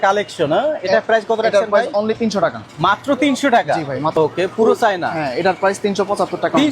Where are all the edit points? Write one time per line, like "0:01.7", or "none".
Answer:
0:04.1